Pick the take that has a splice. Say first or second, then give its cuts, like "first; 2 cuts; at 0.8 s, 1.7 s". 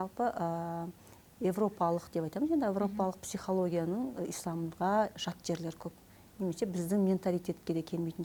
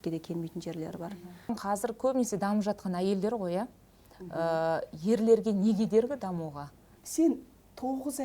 second; 2 cuts; at 1.5 s, 7.0 s